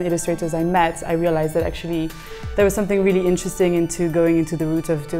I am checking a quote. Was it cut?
no; 0 cuts

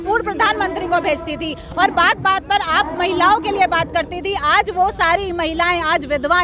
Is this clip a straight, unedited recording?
yes; 0 cuts

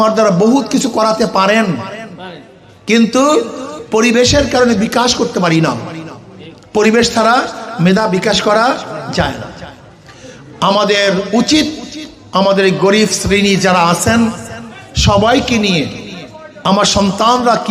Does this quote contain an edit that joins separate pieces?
no; 0 cuts

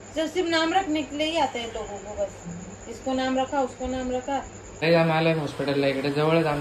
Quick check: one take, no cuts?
no; 1 cut; at 4.6 s

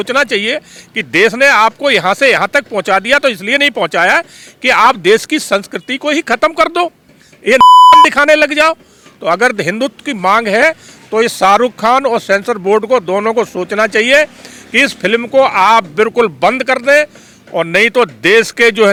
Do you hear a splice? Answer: no; 0 cuts

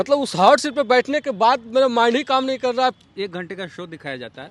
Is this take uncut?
no; 1 cut; at 3.0 s

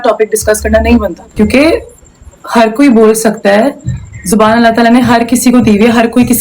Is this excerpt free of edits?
no; 1 cut; at 1.2 s

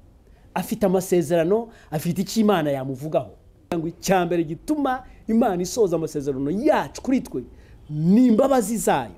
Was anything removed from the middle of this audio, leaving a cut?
yes; 1 cut; at 3.7 s

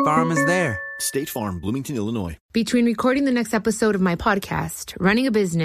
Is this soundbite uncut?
no; 1 cut; at 2.4 s

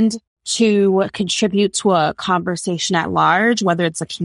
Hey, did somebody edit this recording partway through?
no; 0 cuts

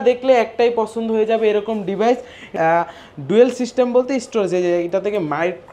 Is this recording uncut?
no; 1 cut; at 2.5 s

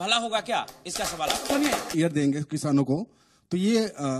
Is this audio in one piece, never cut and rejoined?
no; 1 cut; at 1.9 s

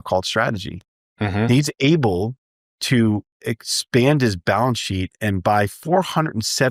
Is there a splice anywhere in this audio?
no; 0 cuts

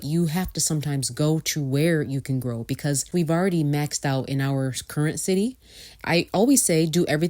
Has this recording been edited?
yes; 2 cuts; at 3.1 s, 5.9 s

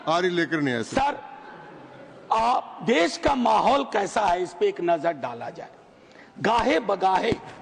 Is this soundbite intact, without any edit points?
yes; 0 cuts

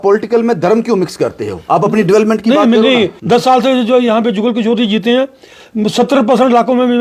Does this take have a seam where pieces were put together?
yes; 1 cut; at 3.2 s

